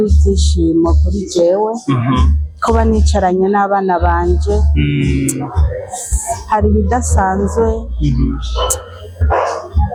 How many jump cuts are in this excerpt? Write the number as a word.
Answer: zero